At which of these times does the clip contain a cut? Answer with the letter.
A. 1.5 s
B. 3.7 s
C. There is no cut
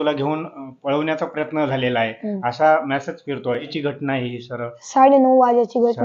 B